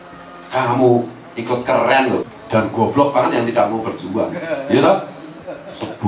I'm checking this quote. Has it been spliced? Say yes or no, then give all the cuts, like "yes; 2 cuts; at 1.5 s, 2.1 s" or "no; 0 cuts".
yes; 1 cut; at 2.2 s